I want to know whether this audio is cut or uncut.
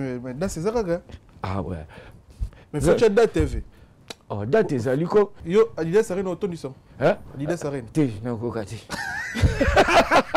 cut